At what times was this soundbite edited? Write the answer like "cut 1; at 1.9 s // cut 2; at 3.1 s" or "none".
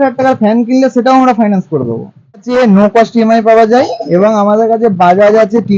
cut 1; at 2.4 s